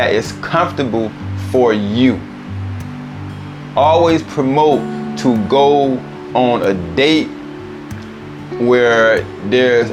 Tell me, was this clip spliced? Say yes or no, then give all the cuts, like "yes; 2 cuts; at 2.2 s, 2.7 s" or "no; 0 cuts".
no; 0 cuts